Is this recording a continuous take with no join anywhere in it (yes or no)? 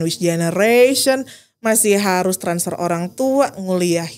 yes